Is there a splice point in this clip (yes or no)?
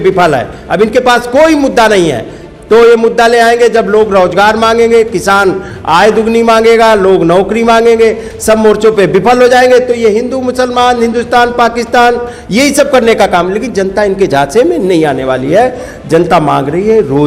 no